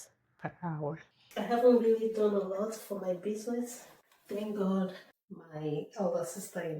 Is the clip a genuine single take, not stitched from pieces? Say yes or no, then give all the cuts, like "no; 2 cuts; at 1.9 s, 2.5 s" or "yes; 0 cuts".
no; 1 cut; at 1.3 s